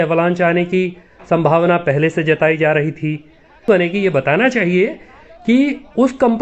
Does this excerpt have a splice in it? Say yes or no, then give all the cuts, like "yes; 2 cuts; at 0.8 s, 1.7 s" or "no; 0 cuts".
yes; 1 cut; at 3.7 s